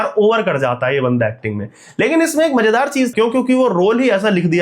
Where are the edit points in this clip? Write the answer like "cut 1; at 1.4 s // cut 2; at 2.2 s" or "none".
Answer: cut 1; at 3.1 s